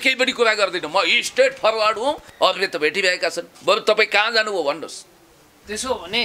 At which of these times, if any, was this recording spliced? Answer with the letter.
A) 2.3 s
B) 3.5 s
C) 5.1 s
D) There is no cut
A